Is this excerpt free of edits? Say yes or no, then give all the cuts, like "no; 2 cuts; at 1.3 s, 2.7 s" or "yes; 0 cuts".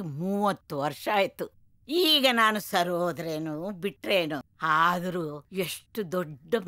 no; 2 cuts; at 4.5 s, 5.4 s